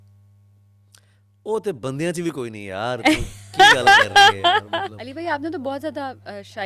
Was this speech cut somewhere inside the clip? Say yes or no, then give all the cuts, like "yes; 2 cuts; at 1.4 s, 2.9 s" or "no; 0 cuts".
yes; 1 cut; at 5.0 s